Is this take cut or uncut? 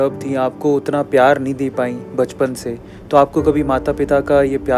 uncut